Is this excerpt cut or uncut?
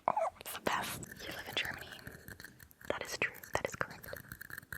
cut